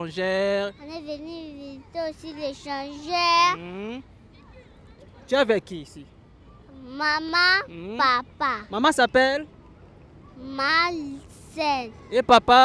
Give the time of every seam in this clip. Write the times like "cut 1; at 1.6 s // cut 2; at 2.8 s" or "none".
none